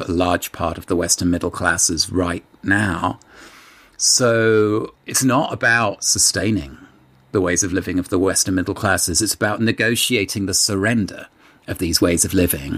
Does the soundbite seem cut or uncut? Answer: cut